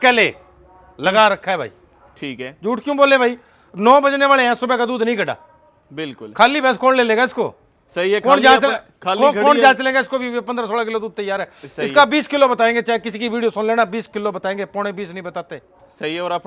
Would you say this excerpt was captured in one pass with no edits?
yes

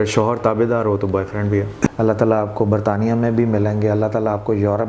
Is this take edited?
yes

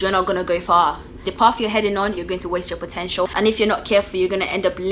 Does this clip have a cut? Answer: yes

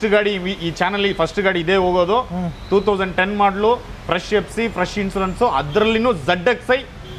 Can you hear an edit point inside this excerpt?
no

